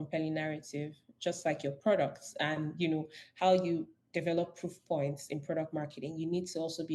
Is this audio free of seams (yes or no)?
yes